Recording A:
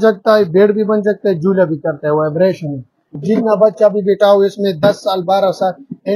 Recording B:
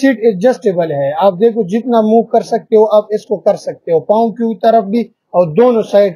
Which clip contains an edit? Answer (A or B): A